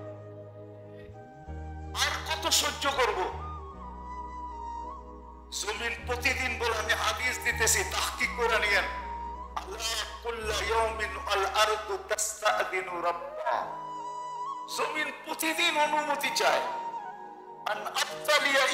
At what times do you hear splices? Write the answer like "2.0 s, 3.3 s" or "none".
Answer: 4.0 s, 5.3 s